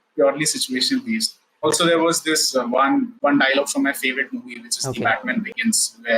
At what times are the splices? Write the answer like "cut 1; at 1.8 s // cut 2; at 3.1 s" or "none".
cut 1; at 1.6 s // cut 2; at 3.1 s